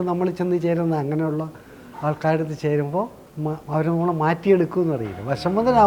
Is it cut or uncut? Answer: cut